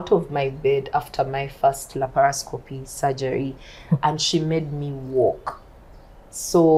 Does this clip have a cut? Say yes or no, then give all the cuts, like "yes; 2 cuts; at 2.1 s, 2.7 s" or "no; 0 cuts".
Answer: no; 0 cuts